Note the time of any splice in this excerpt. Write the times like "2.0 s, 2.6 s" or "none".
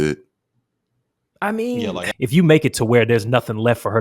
2.0 s